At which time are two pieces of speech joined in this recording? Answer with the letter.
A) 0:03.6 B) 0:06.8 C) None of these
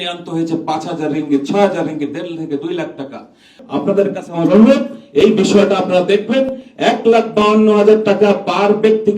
A